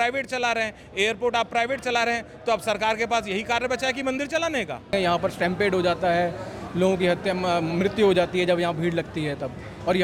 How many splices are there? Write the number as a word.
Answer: one